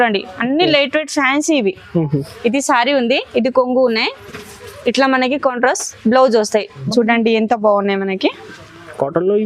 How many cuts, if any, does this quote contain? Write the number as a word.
one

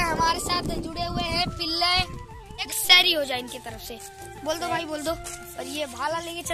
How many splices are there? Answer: two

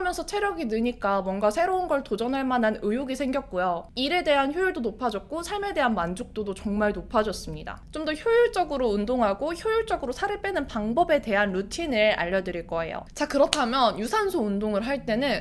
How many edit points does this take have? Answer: two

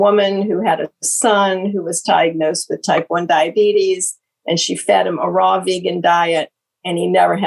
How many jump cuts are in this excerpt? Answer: zero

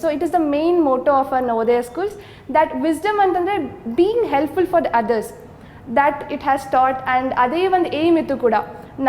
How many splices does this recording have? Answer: zero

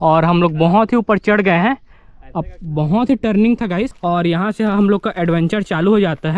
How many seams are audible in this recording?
one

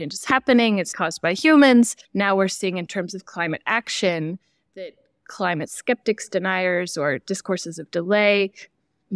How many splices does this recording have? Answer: two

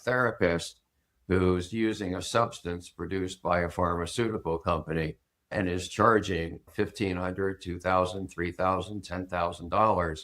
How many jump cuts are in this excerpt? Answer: two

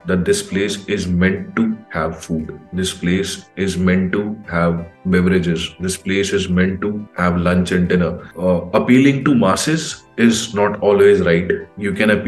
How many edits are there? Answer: one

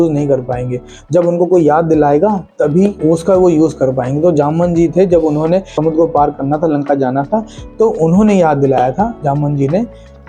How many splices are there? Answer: two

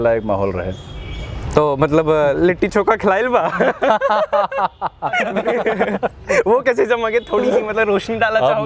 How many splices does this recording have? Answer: one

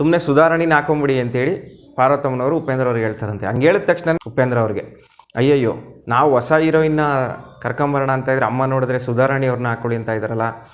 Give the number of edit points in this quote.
zero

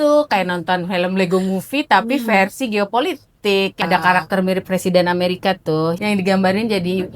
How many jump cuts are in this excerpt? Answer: two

